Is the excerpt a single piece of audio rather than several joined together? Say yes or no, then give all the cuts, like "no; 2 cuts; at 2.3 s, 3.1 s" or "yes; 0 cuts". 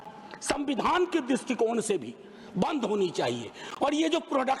yes; 0 cuts